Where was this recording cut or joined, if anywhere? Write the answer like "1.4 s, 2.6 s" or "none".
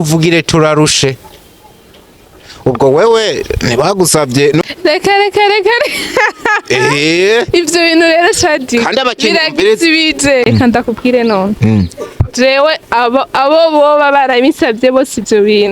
4.6 s, 10.5 s